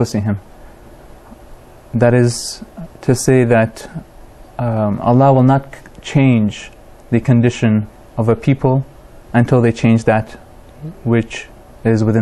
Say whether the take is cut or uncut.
cut